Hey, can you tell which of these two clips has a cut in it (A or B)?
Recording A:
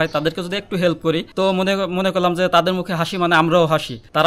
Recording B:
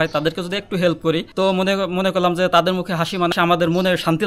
B